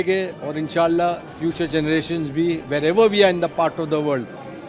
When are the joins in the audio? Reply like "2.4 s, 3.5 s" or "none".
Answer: none